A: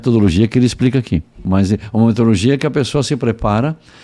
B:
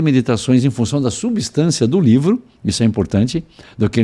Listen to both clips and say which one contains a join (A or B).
A